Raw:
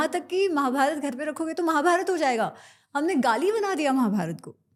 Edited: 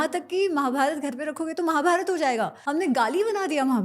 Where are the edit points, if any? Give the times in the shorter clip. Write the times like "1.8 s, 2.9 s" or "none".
2.6 s